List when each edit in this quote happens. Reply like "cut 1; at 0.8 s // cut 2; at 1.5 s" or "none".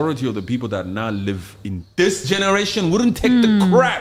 none